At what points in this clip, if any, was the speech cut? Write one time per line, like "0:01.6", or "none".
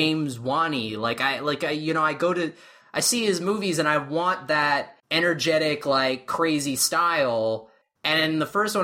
0:05.0